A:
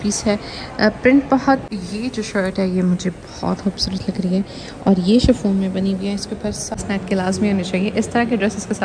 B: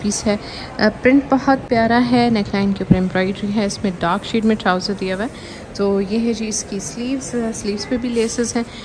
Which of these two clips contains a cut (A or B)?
A